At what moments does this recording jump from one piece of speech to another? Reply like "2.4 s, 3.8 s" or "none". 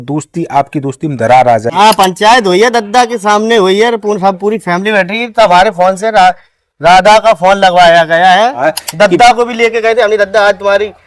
1.7 s, 8.6 s